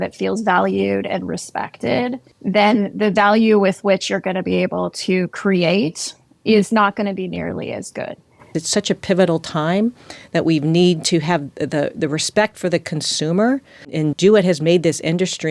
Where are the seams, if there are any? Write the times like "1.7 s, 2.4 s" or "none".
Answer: 2.3 s, 8.6 s, 14.0 s